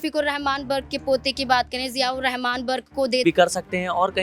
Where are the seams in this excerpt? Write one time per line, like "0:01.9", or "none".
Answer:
0:03.2